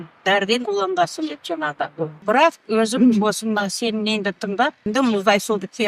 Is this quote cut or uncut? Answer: cut